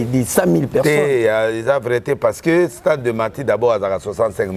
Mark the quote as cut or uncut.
uncut